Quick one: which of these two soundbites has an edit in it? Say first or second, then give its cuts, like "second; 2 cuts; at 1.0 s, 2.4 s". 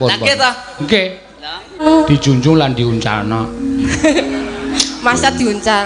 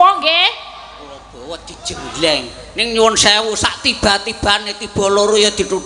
first; 1 cut; at 1.8 s